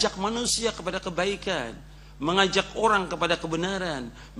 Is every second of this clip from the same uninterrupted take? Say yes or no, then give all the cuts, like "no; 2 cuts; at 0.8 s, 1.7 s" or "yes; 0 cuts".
yes; 0 cuts